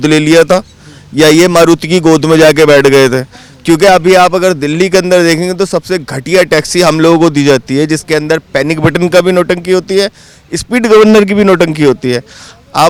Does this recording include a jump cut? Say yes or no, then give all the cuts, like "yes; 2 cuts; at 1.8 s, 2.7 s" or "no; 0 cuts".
no; 0 cuts